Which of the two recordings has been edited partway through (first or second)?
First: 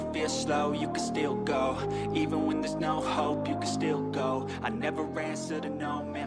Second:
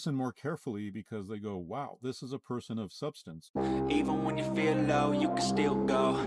second